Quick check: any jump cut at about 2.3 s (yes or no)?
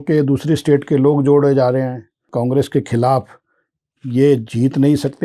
yes